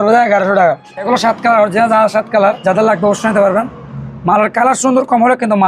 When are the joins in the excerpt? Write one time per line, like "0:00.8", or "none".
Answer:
0:01.1